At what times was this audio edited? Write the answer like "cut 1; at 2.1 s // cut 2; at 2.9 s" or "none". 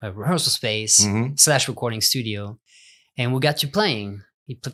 none